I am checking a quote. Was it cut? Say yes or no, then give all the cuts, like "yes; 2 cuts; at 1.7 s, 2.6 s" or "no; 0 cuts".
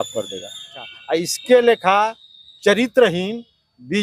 yes; 1 cut; at 1.0 s